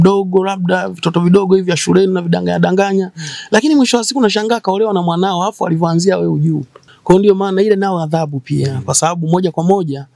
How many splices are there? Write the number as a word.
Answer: one